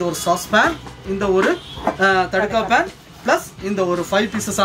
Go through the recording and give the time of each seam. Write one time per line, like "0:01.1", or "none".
none